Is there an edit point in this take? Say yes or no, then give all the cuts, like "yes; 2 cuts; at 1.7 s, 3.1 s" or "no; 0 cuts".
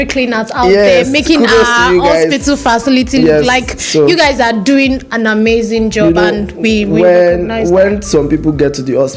no; 0 cuts